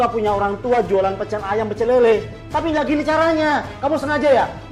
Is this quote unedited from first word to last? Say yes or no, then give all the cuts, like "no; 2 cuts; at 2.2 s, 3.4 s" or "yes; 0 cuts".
yes; 0 cuts